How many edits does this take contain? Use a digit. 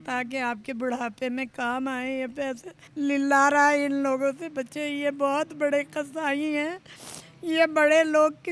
1